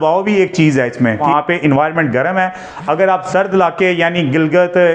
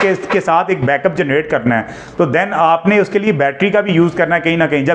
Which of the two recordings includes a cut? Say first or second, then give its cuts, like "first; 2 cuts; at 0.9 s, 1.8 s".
first; 1 cut; at 1.2 s